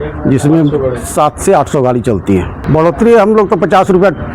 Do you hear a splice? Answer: yes; 1 cut; at 2.6 s

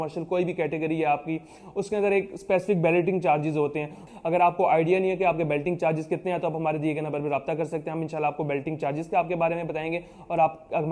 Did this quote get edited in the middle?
yes; 1 cut; at 4.0 s

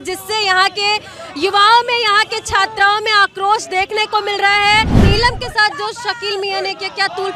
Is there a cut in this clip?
yes; 1 cut; at 5.0 s

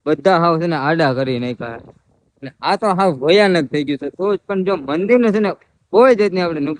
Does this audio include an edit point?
no; 0 cuts

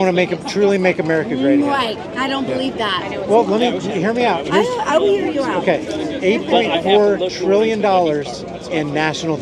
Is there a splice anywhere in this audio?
no; 0 cuts

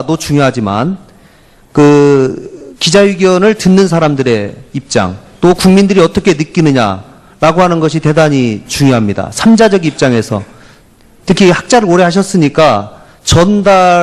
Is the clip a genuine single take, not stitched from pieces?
no; 1 cut; at 3.9 s

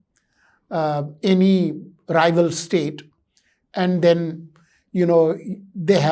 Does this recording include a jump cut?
no; 0 cuts

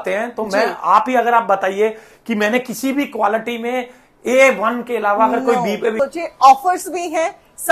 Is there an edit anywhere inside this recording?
yes; 1 cut; at 6.0 s

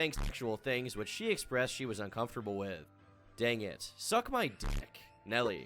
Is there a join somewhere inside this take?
no; 0 cuts

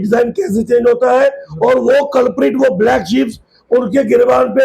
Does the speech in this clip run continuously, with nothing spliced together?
yes; 0 cuts

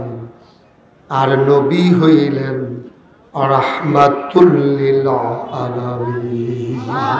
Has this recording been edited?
no; 0 cuts

